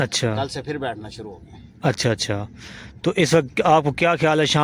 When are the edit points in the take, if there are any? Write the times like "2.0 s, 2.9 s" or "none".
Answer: none